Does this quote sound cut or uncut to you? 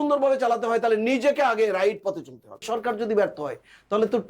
cut